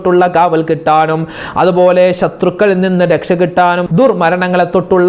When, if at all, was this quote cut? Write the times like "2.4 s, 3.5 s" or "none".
3.8 s